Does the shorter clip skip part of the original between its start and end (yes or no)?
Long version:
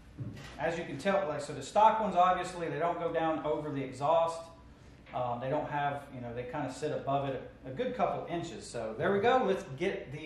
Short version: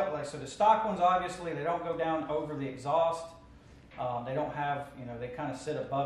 no